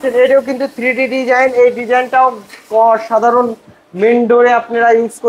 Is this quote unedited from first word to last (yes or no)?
yes